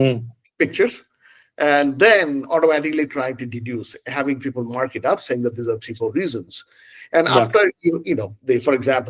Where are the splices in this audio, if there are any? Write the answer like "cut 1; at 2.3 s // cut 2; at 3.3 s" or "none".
none